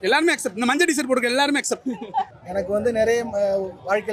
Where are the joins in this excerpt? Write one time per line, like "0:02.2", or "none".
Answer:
0:02.3

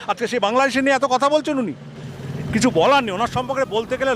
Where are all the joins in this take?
0:02.1

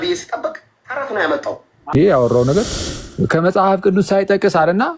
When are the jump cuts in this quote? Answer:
0:01.9

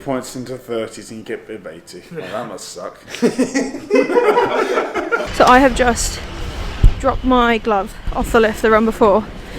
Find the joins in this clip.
0:05.2

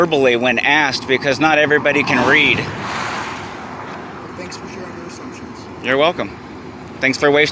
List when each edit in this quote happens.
0:03.6

